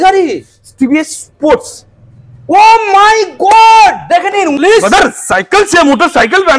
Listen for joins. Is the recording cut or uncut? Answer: cut